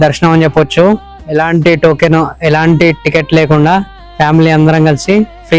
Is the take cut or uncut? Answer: uncut